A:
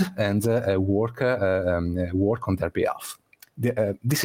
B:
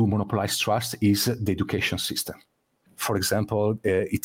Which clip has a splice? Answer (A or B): B